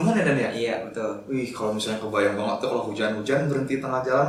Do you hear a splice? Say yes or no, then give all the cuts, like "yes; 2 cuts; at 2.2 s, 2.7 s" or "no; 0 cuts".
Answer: no; 0 cuts